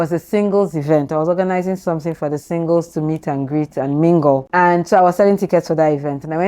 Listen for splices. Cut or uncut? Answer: cut